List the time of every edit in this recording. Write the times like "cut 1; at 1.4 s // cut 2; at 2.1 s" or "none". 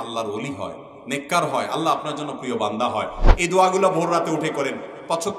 cut 1; at 3.2 s